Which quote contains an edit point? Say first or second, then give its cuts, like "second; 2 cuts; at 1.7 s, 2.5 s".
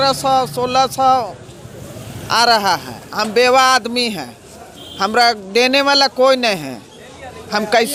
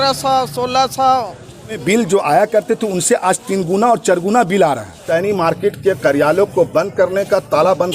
second; 2 cuts; at 1.8 s, 4.9 s